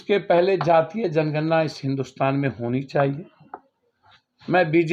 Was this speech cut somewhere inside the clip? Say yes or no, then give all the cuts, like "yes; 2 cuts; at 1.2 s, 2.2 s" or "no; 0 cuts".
no; 0 cuts